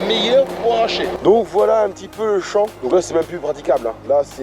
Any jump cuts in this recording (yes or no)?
yes